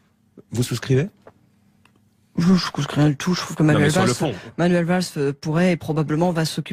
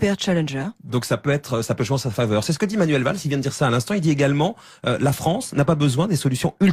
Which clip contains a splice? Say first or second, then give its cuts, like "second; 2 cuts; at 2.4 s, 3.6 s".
second; 1 cut; at 4.9 s